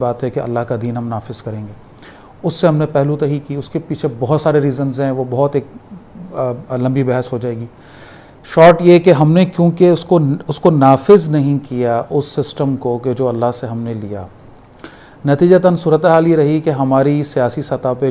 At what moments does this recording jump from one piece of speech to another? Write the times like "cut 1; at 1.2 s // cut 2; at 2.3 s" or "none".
none